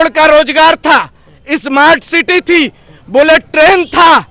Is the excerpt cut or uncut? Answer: uncut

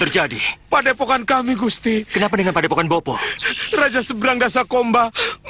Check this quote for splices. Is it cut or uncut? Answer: uncut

